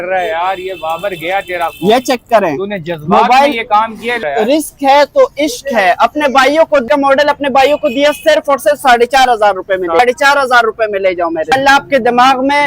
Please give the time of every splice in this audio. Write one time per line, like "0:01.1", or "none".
0:04.2
0:06.8
0:10.0
0:11.5